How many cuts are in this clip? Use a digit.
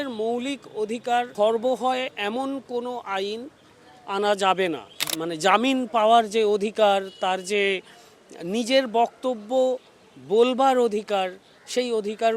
2